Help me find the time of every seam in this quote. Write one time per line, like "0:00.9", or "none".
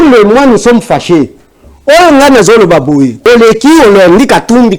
0:03.2